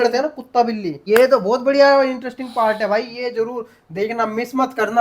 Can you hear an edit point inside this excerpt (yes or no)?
yes